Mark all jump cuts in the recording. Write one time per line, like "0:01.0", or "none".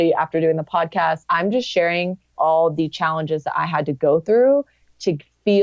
0:01.2
0:02.3